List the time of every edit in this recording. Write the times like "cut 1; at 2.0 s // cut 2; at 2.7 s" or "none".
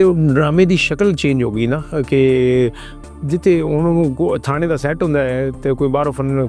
none